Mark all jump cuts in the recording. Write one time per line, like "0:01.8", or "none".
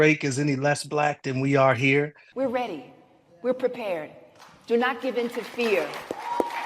0:02.2